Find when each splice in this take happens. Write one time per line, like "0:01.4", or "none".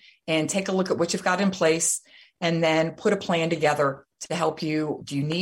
none